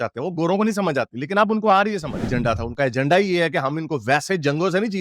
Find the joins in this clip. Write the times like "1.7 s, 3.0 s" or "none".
2.2 s